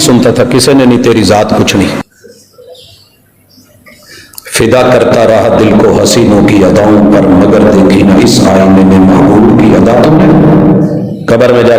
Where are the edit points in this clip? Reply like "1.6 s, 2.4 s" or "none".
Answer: 2.0 s